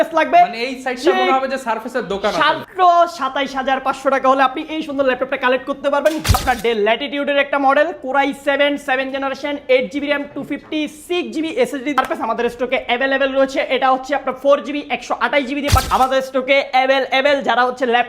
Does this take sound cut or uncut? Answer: cut